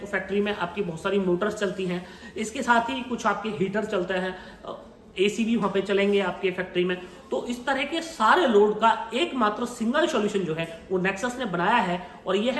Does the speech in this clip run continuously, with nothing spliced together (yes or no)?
yes